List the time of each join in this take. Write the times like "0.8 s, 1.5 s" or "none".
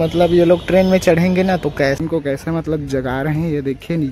2.0 s